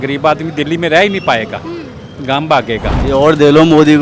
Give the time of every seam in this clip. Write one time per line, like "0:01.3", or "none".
0:02.9